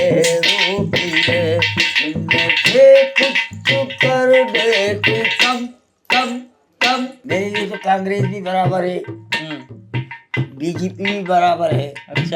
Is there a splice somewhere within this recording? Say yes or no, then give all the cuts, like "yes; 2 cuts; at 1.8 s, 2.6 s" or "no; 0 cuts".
yes; 1 cut; at 7.2 s